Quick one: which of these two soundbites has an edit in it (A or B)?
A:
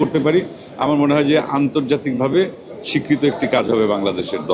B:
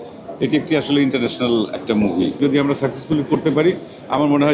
B